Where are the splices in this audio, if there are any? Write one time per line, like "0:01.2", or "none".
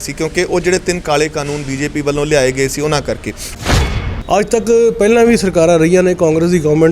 0:03.5